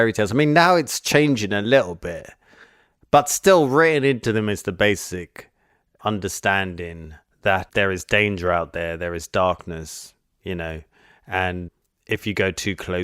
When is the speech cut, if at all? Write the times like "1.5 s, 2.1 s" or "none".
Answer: 7.6 s, 11.7 s